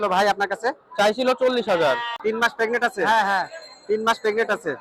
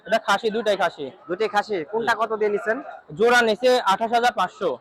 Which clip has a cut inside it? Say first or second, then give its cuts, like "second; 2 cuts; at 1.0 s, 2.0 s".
first; 1 cut; at 2.1 s